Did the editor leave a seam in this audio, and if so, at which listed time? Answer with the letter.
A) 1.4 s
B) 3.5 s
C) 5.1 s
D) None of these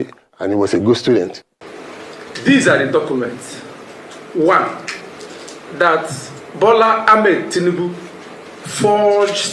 A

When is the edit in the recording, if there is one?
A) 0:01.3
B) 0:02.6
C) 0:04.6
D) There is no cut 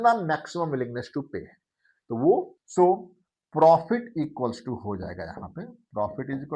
B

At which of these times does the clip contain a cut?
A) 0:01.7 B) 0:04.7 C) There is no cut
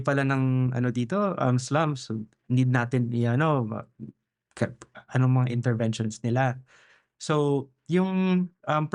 C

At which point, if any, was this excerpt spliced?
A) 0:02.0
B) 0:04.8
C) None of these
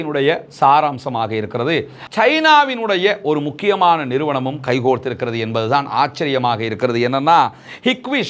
A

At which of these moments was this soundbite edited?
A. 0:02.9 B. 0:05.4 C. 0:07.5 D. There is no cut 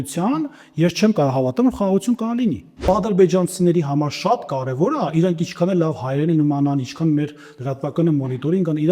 A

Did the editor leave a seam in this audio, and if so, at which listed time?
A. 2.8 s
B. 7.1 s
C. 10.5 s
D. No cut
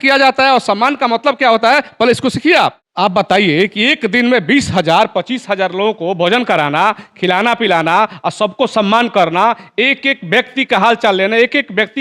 A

